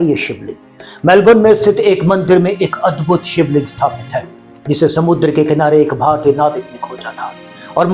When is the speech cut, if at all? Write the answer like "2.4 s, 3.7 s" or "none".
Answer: none